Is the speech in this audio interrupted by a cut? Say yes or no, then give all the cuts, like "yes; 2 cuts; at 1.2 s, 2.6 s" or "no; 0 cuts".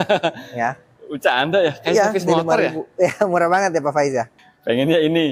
yes; 1 cut; at 4.4 s